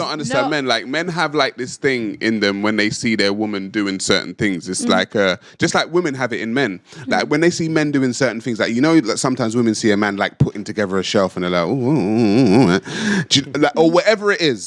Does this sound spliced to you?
yes; 1 cut; at 6.6 s

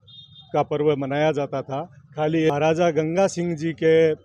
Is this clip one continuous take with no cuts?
no; 1 cut; at 2.5 s

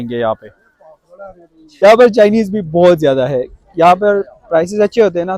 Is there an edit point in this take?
yes; 1 cut; at 1.8 s

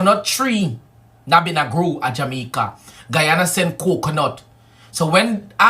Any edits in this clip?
yes; 1 cut; at 2.7 s

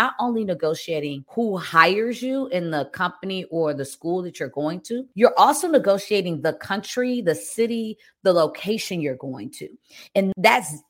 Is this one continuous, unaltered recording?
no; 2 cuts; at 1.2 s, 5.1 s

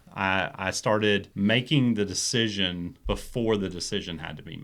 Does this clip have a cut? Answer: yes; 2 cuts; at 1.3 s, 2.9 s

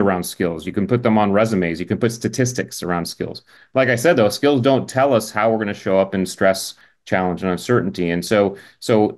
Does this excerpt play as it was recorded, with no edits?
yes; 0 cuts

